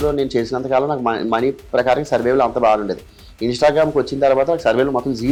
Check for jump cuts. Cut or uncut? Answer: uncut